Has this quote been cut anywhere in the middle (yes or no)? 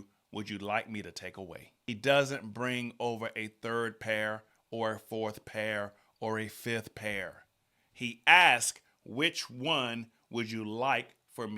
yes